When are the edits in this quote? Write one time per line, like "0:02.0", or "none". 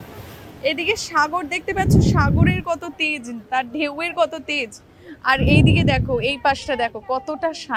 none

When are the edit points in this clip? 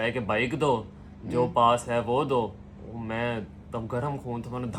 none

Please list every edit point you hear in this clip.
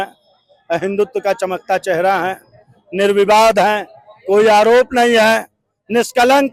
none

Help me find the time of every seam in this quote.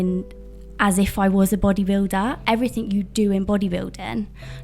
0:02.4

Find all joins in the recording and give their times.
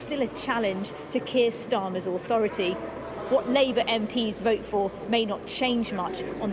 none

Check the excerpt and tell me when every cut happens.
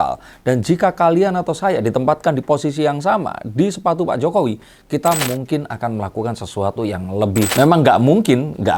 0:07.5

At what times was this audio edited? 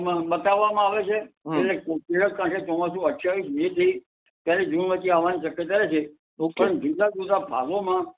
0:01.4

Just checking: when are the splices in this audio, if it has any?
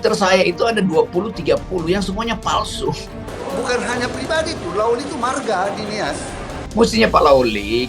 0:03.1
0:06.6

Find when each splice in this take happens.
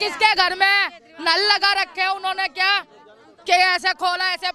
none

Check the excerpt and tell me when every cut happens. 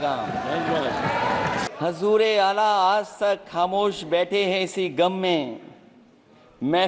0:01.7

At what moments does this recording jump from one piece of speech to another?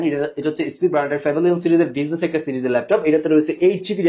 none

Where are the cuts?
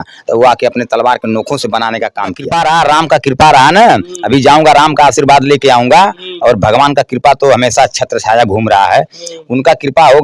0:02.4

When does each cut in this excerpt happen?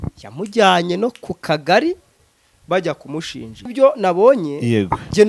0:03.7

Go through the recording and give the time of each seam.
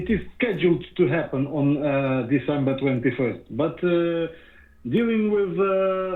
none

